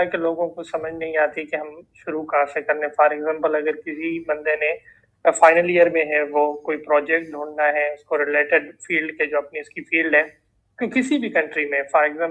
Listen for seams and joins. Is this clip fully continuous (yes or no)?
yes